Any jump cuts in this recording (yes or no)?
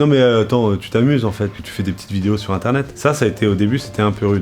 yes